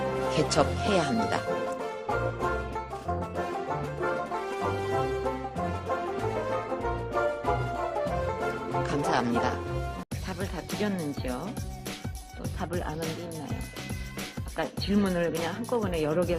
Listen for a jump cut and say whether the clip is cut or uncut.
cut